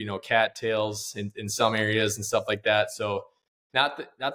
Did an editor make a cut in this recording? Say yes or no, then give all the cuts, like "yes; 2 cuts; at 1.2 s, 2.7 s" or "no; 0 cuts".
no; 0 cuts